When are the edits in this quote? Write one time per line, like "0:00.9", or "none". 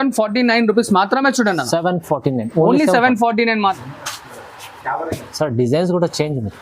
0:03.8